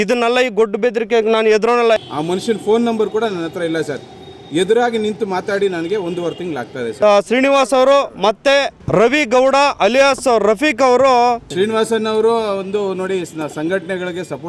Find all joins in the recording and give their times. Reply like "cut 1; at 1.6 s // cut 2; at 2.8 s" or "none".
cut 1; at 2.0 s // cut 2; at 6.9 s // cut 3; at 11.4 s